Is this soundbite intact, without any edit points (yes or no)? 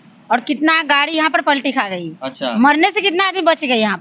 yes